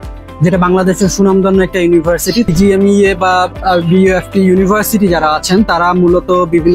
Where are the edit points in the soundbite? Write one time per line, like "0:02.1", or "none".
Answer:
0:02.5